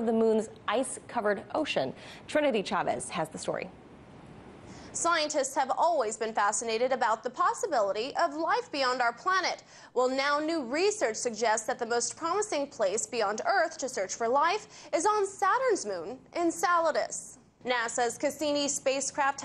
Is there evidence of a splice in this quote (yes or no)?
yes